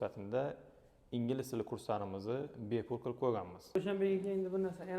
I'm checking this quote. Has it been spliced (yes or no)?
yes